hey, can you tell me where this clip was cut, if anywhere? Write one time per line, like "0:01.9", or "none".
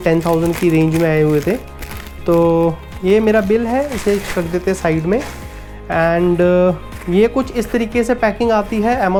none